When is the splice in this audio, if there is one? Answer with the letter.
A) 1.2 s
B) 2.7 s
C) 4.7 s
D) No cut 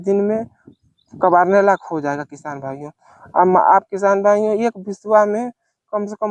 D